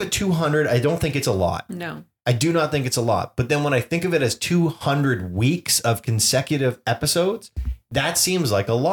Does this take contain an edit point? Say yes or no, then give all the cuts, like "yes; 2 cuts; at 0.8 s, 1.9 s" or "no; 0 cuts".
no; 0 cuts